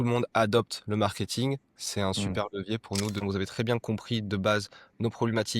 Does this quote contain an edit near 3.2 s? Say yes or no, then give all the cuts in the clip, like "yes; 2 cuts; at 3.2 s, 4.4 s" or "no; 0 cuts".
yes; 1 cut; at 3.2 s